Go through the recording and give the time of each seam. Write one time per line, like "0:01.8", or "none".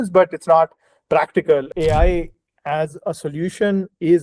0:01.7